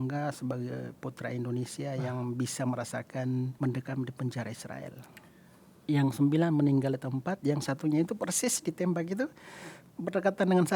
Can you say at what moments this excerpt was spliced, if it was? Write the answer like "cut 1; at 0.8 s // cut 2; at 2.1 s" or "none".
cut 1; at 3.5 s // cut 2; at 5.7 s